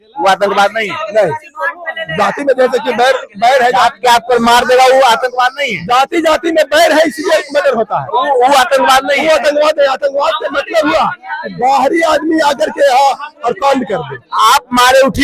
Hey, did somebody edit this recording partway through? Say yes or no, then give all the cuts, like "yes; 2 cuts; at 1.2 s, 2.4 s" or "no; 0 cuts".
no; 0 cuts